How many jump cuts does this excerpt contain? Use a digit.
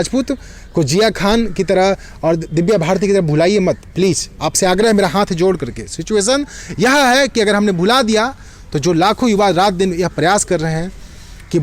0